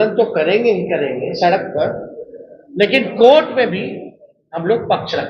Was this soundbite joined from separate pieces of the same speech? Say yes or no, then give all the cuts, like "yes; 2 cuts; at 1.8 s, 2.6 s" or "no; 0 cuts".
no; 0 cuts